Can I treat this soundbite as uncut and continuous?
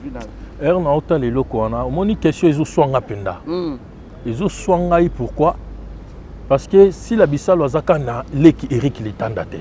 yes; 0 cuts

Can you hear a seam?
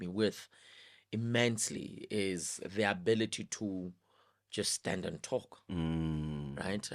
no; 0 cuts

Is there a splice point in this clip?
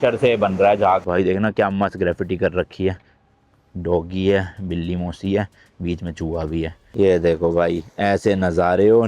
yes; 2 cuts; at 1.0 s, 6.8 s

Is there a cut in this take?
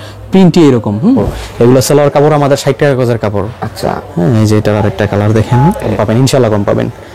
yes; 2 cuts; at 1.2 s, 5.9 s

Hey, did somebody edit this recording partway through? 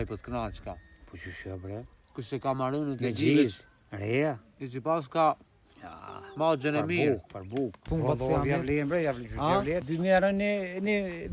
yes; 2 cuts; at 7.9 s, 9.9 s

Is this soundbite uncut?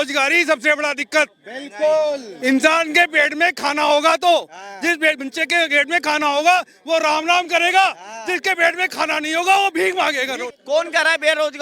no; 1 cut; at 10.5 s

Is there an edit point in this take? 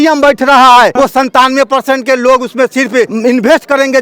yes; 2 cuts; at 0.9 s, 3.1 s

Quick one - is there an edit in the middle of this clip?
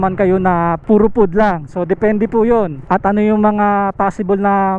yes; 2 cuts; at 0.8 s, 2.8 s

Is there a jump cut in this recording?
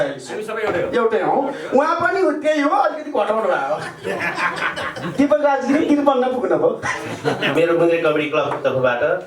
yes; 1 cut; at 7.5 s

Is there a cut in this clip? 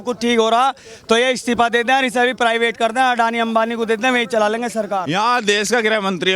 yes; 1 cut; at 5.0 s

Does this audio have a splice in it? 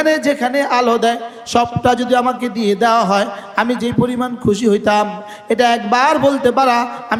no; 0 cuts

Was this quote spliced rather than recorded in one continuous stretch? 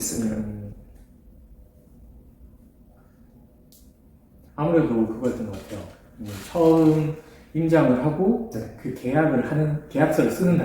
no; 0 cuts

